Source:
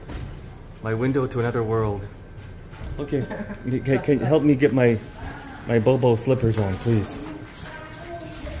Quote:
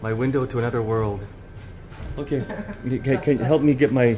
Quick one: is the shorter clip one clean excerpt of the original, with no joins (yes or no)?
yes